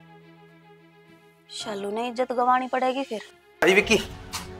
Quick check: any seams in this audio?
yes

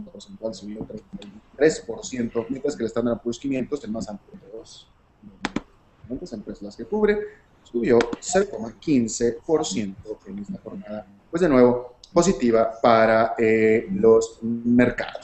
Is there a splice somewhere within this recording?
no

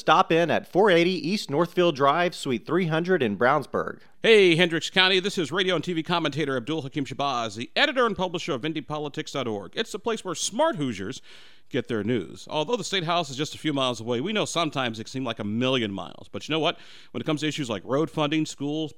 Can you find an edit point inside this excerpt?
yes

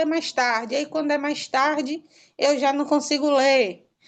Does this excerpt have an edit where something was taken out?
no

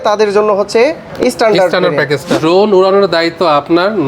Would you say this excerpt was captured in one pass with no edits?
no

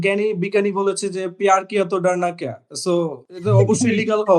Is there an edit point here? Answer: yes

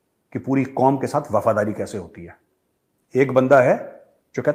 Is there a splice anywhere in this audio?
no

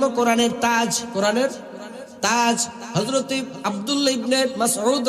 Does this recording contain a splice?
yes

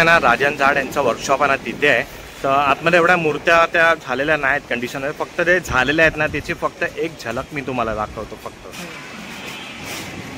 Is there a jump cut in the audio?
no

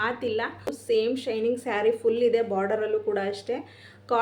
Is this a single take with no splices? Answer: no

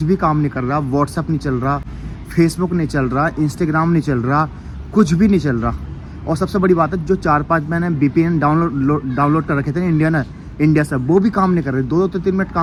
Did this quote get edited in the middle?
no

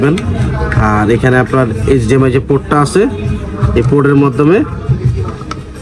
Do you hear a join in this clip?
no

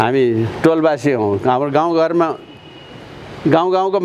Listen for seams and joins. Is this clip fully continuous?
yes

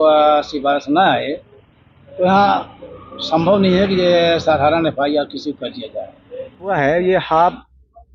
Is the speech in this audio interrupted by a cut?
yes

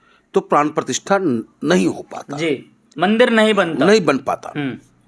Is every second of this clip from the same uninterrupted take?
yes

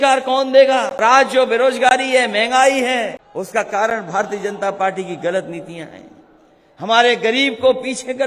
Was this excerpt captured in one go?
no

